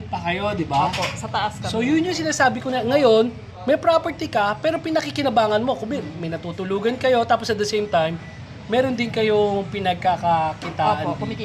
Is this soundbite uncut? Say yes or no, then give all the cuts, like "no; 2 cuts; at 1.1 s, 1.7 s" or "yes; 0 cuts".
yes; 0 cuts